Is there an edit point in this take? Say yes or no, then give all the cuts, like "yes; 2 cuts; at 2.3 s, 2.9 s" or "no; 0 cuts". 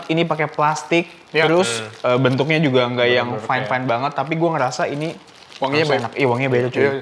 no; 0 cuts